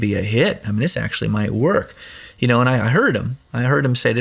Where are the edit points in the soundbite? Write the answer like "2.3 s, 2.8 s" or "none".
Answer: none